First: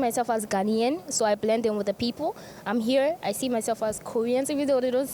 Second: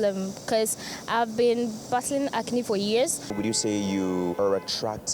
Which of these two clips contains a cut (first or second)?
second